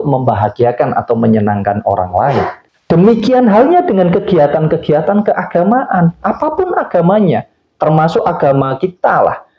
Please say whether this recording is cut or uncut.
cut